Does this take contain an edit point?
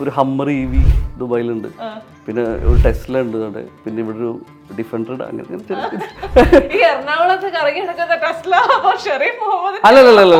no; 0 cuts

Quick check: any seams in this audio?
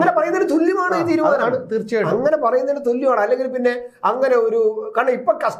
no; 0 cuts

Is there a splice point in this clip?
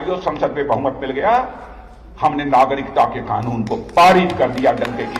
no; 0 cuts

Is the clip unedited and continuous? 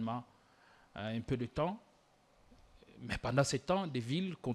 yes; 0 cuts

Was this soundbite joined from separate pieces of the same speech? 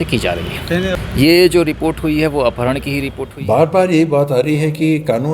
yes; 1 cut; at 3.2 s

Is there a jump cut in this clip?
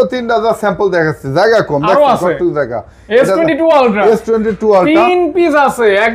no; 0 cuts

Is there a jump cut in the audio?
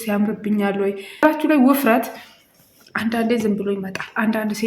yes; 1 cut; at 1.2 s

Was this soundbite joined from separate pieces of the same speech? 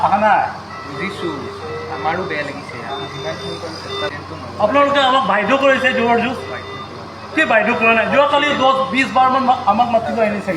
yes; 1 cut; at 4.1 s

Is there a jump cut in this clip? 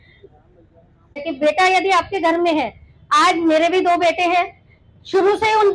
yes; 1 cut; at 1.3 s

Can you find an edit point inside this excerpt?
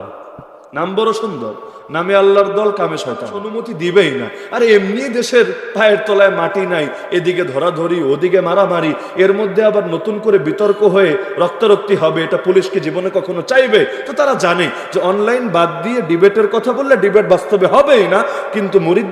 yes; 1 cut; at 3.6 s

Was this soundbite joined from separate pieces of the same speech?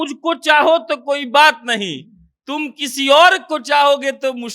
no; 0 cuts

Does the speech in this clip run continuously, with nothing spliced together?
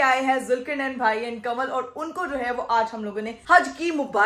yes; 0 cuts

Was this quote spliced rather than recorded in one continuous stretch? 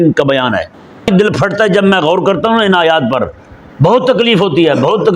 yes; 1 cut; at 1.0 s

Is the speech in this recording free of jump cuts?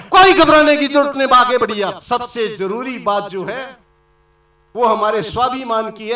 no; 1 cut; at 2.0 s

